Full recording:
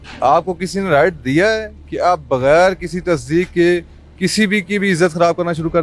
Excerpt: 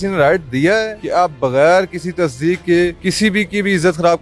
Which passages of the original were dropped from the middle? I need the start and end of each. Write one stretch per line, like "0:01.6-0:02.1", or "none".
0:01.7-0:01.9
0:03.9-0:04.2